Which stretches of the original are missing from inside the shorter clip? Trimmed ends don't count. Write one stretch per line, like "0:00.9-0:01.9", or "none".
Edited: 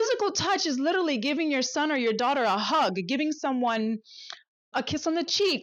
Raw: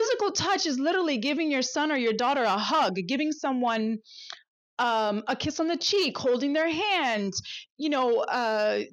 0:04.7-0:05.2